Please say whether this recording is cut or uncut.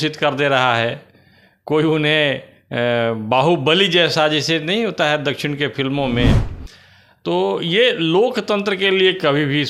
uncut